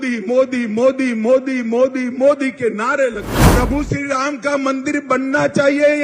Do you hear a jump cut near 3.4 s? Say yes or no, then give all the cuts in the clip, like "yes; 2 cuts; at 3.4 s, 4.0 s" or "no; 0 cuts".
yes; 1 cut; at 3.4 s